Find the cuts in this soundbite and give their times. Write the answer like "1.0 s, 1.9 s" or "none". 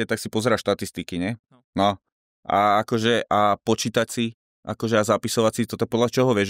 none